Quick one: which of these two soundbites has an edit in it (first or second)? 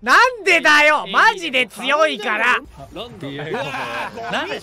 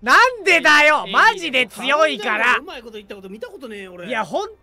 first